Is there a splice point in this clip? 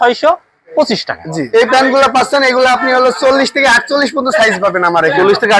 yes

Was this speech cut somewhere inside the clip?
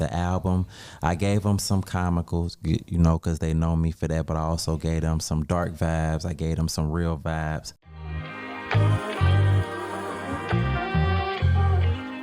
yes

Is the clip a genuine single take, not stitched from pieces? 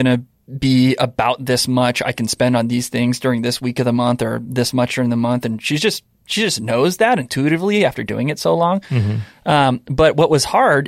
yes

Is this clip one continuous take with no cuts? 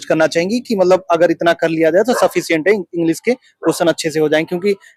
yes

